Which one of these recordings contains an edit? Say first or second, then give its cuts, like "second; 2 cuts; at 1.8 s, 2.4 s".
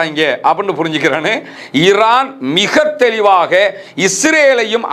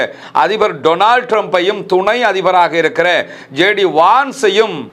first; 1 cut; at 1.6 s